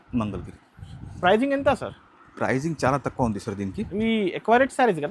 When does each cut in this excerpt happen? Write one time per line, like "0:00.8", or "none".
none